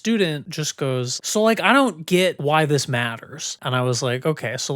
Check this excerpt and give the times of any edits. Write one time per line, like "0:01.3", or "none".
0:01.1
0:02.4